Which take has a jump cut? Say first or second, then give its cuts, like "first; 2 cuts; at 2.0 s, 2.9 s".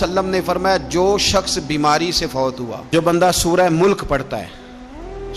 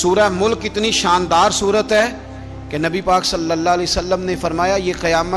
first; 1 cut; at 2.8 s